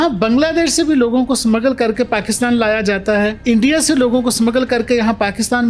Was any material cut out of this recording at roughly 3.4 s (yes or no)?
yes